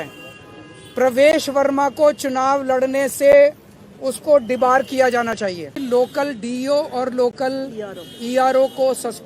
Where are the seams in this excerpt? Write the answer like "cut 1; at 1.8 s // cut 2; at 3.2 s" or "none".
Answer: cut 1; at 5.8 s